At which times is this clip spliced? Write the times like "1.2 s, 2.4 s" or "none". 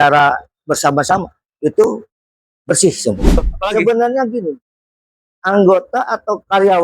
3.4 s